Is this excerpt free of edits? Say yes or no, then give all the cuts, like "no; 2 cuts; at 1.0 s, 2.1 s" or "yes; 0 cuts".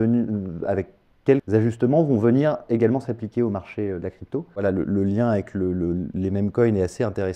no; 2 cuts; at 1.4 s, 4.6 s